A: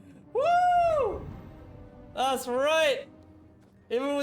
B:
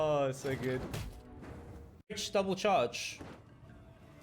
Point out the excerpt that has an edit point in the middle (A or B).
B